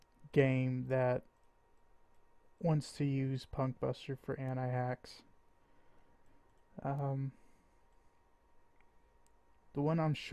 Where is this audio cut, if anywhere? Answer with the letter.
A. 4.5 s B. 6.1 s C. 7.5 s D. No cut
C